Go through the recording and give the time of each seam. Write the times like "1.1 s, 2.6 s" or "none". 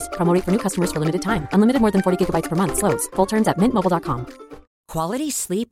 none

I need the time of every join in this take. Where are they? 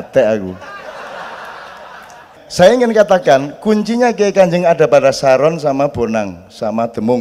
2.4 s

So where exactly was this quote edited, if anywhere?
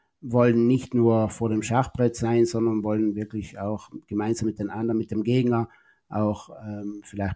none

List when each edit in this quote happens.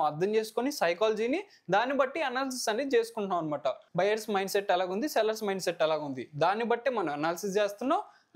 3.8 s

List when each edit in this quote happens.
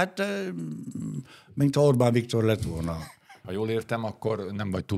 3.4 s

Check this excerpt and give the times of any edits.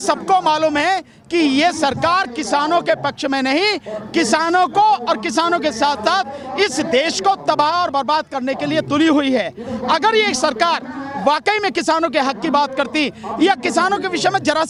none

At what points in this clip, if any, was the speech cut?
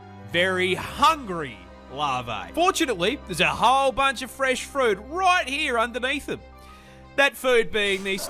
none

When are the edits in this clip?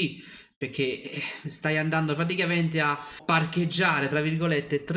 3.2 s

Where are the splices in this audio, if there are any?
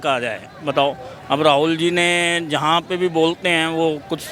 none

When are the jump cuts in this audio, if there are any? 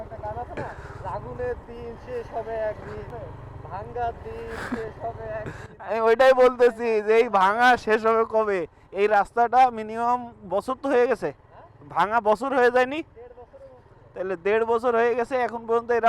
none

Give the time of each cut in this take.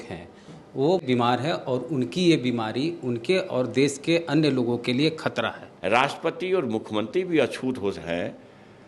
5.7 s

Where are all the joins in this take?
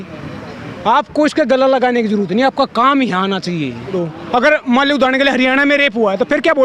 4.0 s

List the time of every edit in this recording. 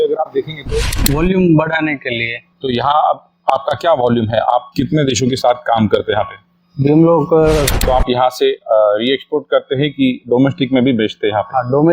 0.9 s, 7.7 s

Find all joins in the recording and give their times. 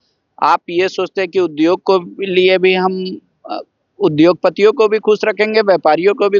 none

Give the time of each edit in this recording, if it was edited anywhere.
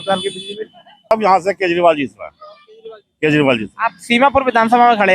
1.1 s

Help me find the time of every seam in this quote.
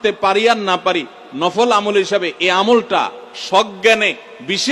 none

